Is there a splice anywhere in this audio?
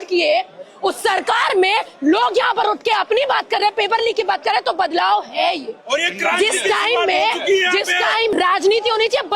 yes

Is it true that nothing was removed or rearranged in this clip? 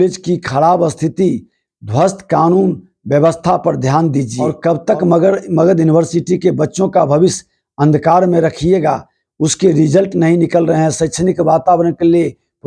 no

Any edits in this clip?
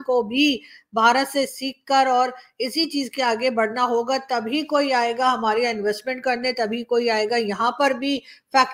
no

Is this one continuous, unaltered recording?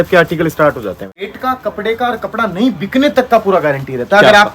no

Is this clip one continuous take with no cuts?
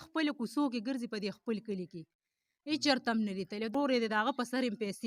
no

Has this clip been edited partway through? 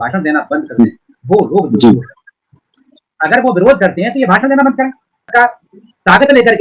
yes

